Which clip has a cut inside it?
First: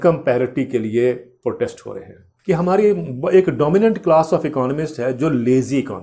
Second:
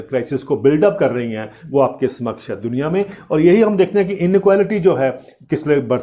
first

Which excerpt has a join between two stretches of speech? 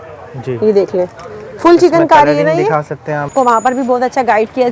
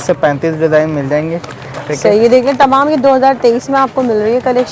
first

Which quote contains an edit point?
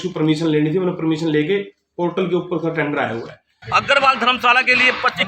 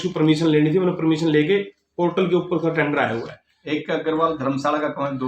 first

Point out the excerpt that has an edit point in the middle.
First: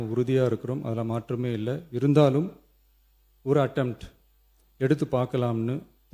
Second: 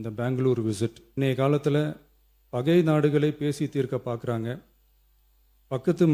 second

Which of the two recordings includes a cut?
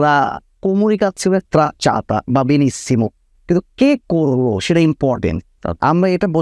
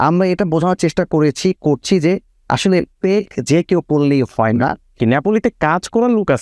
second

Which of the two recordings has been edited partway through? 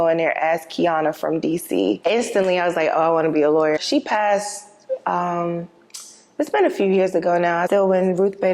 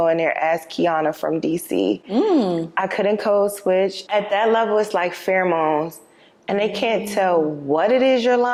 first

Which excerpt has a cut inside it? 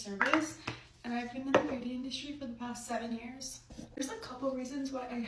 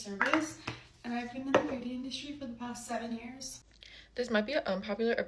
second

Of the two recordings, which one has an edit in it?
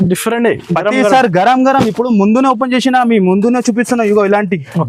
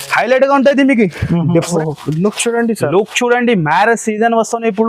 second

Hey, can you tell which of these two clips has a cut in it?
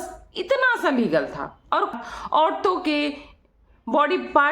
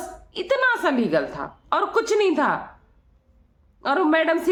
first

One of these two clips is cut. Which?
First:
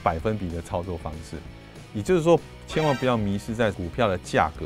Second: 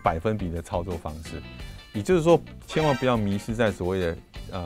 first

